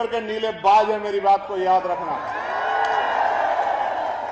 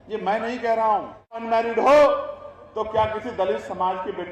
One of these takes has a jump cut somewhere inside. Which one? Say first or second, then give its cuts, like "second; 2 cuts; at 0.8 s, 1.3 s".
second; 1 cut; at 1.3 s